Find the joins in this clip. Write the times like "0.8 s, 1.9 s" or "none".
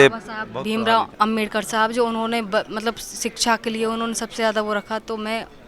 1.1 s

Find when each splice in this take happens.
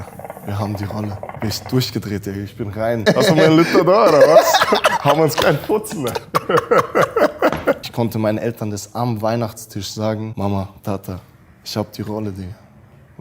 1.4 s, 3.1 s, 7.9 s, 10.3 s

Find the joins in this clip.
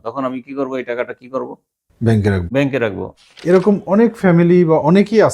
3.4 s

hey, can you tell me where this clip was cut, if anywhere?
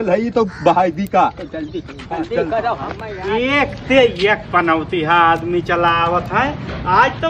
3.1 s

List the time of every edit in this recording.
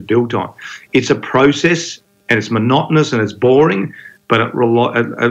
none

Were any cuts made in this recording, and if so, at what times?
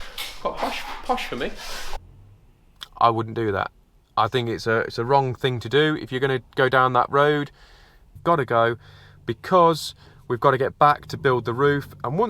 1.9 s, 8.1 s

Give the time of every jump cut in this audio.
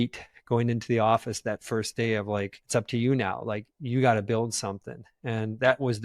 2.6 s

